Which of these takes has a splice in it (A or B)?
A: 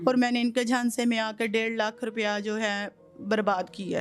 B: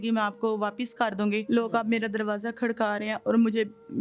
B